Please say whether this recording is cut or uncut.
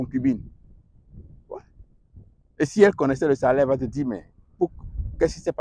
uncut